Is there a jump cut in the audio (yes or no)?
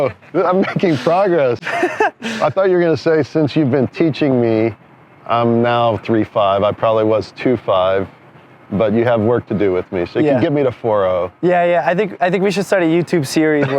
no